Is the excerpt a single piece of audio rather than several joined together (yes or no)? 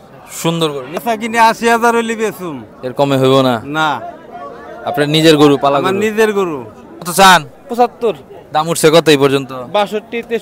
no